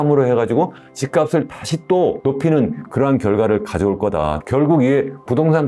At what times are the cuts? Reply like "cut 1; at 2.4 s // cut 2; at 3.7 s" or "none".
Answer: cut 1; at 4.4 s